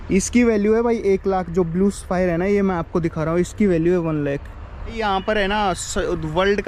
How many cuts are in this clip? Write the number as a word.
one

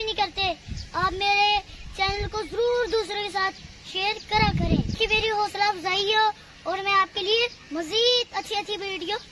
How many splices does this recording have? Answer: one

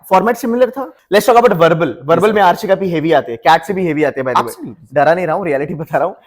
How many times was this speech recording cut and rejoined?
one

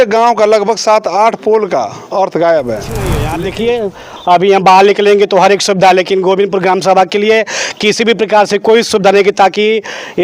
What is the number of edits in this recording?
one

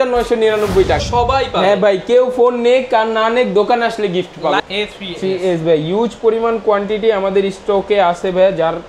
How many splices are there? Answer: two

